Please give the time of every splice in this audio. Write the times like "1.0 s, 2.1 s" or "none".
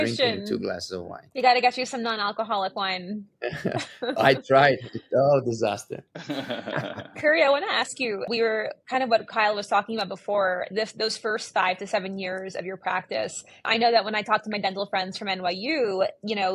none